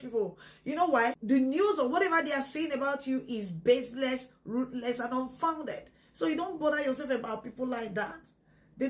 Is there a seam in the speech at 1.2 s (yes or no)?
yes